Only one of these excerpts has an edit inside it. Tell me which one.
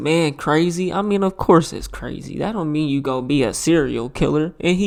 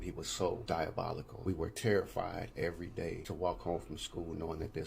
second; 2 cuts; at 1.0 s, 3.2 s

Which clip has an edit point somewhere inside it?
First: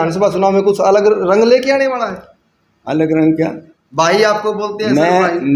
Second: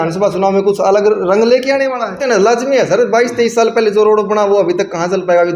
second; 1 cut; at 2.2 s

